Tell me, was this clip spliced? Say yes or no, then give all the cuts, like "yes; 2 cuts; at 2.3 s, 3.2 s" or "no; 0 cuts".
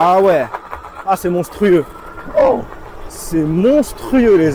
no; 0 cuts